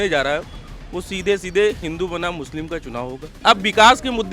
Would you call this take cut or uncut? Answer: cut